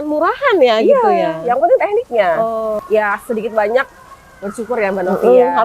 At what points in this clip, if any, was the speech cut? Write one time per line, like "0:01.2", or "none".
0:02.8